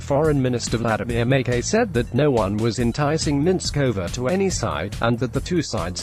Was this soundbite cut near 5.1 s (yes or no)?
no